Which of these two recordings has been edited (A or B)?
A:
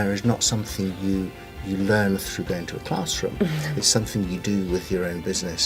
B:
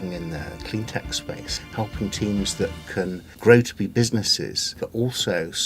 B